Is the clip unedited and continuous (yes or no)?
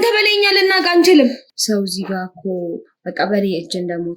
no